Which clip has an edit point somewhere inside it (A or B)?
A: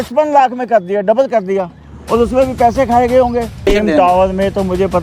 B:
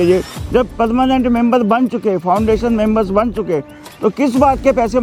A